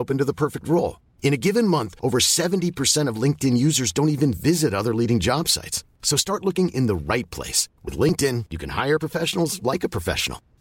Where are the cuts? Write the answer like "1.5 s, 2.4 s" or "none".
none